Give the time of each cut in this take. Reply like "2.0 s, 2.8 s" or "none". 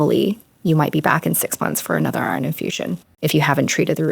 3.1 s